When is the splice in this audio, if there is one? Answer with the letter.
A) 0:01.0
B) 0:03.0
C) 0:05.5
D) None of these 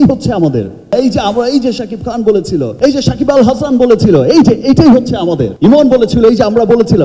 D